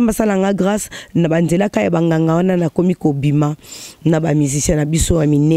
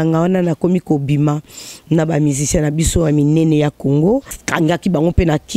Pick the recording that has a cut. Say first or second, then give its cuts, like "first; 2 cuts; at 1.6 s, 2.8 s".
second; 1 cut; at 4.4 s